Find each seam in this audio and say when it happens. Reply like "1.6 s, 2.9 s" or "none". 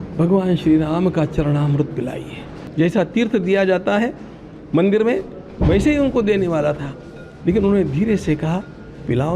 2.6 s